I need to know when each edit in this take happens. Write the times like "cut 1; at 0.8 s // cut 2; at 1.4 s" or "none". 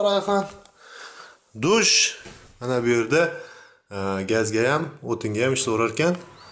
none